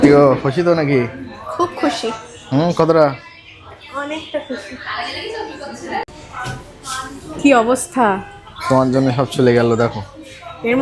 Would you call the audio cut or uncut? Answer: uncut